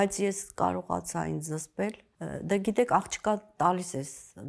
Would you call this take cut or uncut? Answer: cut